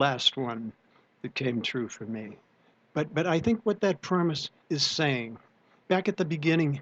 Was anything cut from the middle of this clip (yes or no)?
yes